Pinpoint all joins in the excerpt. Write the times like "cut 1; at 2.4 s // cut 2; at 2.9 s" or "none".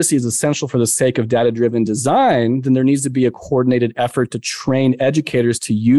none